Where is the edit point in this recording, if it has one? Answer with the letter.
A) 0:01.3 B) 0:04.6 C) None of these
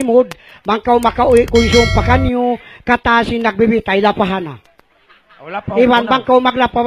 B